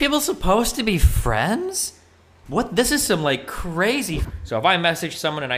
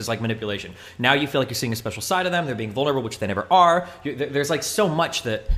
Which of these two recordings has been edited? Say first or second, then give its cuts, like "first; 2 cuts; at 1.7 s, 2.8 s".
first; 1 cut; at 4.2 s